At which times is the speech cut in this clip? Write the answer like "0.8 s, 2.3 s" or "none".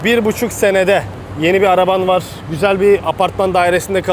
1.2 s, 2.4 s